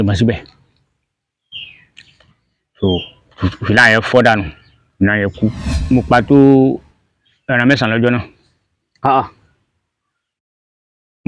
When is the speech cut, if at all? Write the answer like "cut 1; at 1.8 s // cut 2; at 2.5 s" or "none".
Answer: cut 1; at 5.8 s